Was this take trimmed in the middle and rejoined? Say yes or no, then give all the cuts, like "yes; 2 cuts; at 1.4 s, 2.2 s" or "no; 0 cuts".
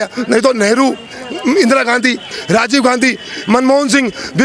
no; 0 cuts